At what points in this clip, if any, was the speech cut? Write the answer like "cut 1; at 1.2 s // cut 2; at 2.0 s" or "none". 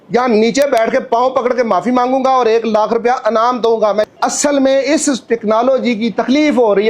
cut 1; at 4.1 s